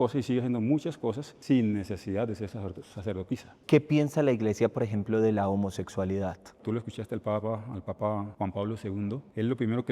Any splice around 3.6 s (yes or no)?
yes